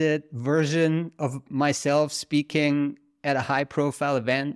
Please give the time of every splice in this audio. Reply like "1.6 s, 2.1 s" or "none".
none